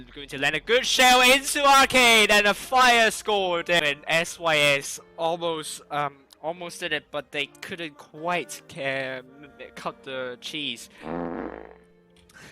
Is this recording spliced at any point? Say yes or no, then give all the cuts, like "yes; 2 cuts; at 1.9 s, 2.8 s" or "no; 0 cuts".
no; 0 cuts